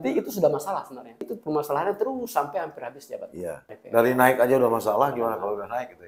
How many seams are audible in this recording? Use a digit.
2